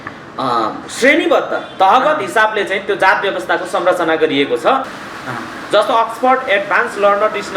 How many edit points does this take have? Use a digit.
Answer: 1